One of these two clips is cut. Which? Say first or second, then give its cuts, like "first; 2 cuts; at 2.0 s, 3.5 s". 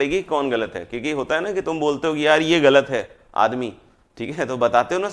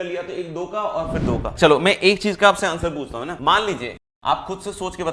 second; 3 cuts; at 1.5 s, 3.3 s, 4.1 s